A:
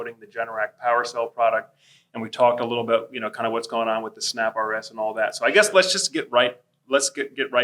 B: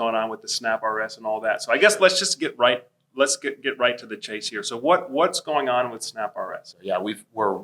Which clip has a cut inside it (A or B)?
B